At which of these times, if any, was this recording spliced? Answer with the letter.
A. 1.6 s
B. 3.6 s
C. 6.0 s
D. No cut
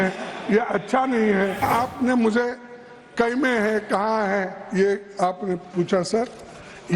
A